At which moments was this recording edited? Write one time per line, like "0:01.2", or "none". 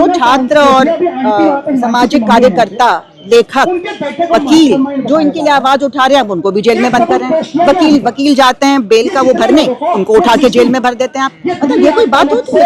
none